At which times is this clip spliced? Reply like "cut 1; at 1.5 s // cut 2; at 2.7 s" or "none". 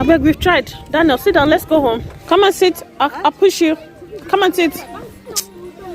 cut 1; at 2.1 s